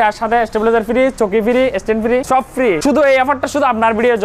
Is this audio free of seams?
no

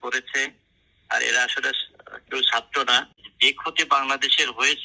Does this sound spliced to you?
yes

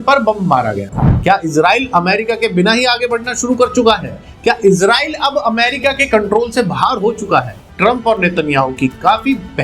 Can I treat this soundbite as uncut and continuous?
no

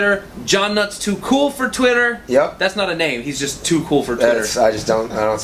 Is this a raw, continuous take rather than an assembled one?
yes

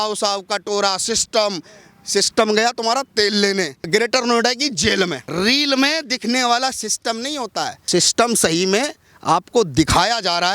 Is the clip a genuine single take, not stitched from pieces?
no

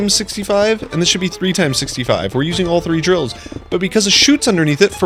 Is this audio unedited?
yes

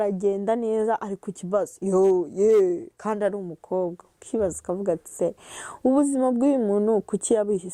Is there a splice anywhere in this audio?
no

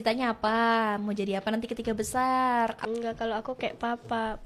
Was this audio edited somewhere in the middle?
yes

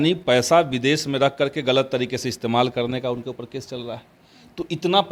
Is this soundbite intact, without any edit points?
yes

